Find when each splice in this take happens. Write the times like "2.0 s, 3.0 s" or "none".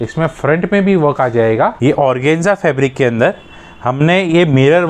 1.8 s

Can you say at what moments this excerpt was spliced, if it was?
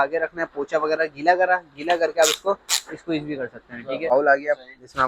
4.1 s

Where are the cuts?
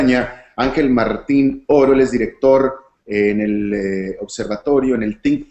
4.2 s

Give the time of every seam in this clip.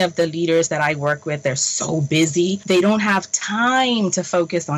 2.6 s

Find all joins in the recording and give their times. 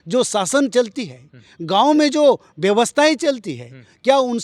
none

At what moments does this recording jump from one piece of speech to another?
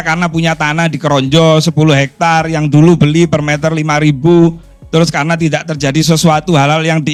none

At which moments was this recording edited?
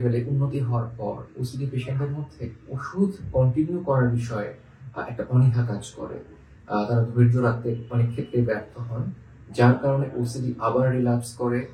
none

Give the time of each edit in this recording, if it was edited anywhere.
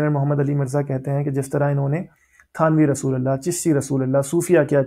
none

